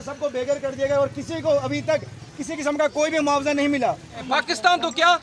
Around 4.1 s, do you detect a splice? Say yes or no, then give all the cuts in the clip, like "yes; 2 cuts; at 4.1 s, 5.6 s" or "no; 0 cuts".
yes; 1 cut; at 4.1 s